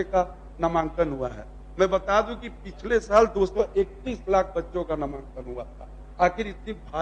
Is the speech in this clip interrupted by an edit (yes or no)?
no